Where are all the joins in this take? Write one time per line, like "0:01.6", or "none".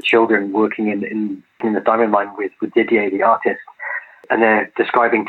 none